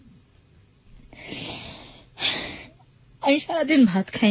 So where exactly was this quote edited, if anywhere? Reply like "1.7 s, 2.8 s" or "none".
none